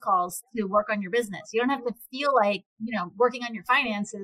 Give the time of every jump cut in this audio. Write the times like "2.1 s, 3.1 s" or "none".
2.7 s

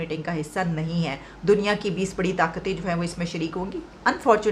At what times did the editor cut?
none

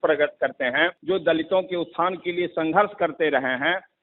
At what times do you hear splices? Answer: 1.0 s

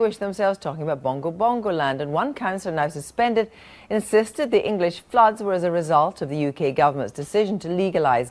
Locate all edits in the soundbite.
2.4 s

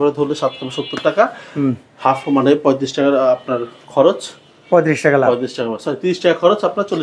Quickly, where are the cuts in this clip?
none

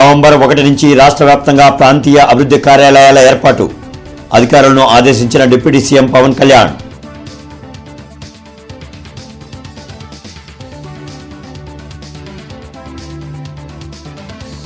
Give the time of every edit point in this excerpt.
none

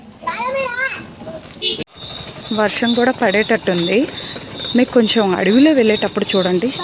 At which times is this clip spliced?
2.0 s

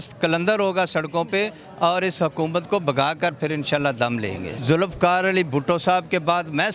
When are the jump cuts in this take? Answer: 4.6 s

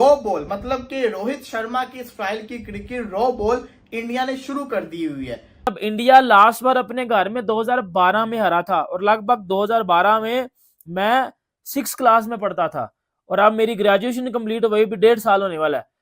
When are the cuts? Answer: 5.5 s

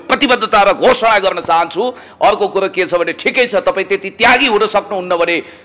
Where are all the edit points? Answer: none

